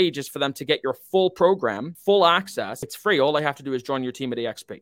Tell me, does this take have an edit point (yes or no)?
yes